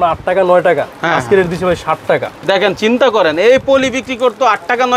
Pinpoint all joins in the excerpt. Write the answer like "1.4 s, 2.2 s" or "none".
none